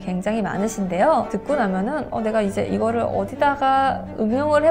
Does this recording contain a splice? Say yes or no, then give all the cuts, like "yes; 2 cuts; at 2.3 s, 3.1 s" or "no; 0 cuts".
yes; 1 cut; at 1.3 s